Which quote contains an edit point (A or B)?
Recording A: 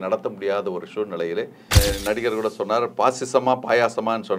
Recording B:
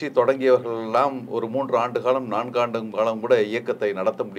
A